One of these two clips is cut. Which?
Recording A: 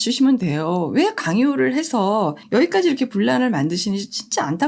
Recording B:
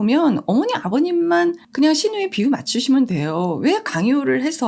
B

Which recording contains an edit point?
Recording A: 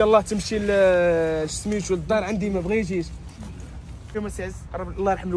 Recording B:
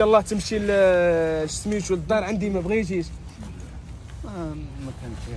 A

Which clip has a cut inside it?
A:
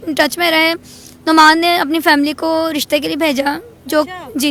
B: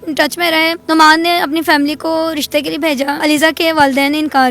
B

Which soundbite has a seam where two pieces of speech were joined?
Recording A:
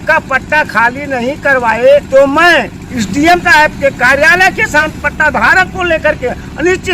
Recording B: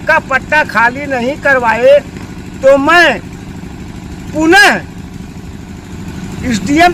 A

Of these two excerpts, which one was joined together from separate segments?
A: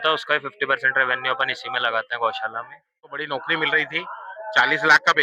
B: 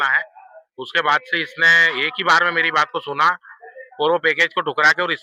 A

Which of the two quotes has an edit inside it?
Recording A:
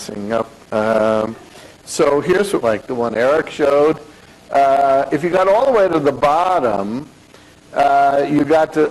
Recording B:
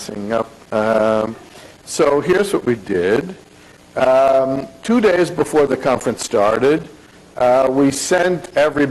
B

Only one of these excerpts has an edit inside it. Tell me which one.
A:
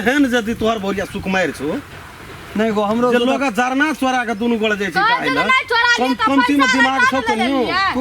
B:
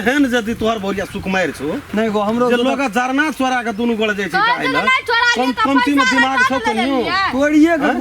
B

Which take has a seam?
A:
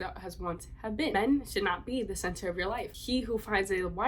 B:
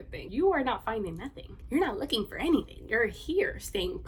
A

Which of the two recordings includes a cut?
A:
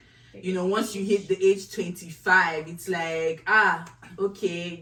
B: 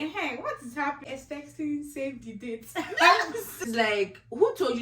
B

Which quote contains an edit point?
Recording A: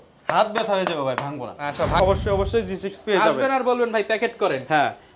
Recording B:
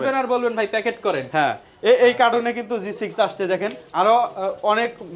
A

